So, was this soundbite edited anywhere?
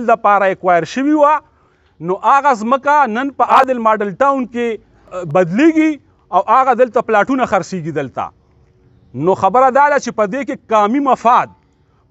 yes; 2 cuts; at 3.6 s, 5.2 s

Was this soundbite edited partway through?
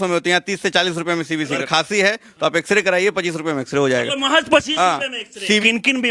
yes; 2 cuts; at 1.7 s, 5.2 s

